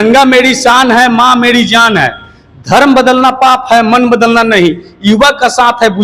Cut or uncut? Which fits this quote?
uncut